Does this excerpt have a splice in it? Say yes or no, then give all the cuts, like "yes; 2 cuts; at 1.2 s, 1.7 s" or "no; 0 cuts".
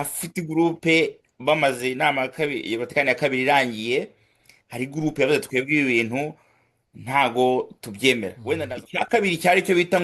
yes; 1 cut; at 8.6 s